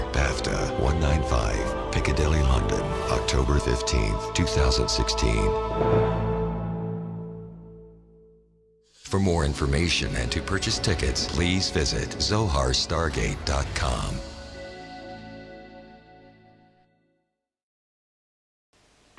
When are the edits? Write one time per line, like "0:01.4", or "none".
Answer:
0:07.9